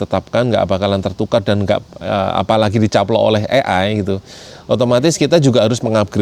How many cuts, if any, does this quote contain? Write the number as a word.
zero